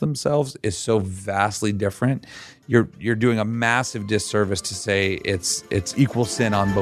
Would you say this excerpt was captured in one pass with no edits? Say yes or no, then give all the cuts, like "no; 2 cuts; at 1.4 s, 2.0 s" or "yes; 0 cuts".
no; 1 cut; at 5.9 s